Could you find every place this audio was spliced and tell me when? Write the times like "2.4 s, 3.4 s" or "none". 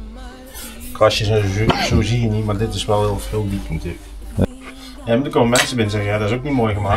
4.4 s

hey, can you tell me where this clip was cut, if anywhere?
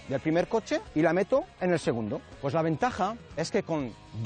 0.9 s, 2.3 s

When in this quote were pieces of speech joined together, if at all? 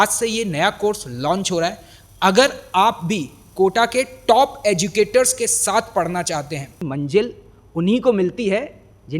6.8 s

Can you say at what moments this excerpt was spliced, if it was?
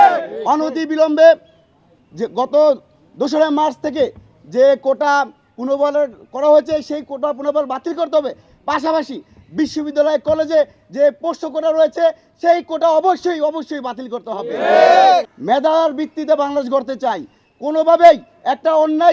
15.3 s

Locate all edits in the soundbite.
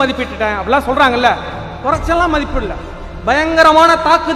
none

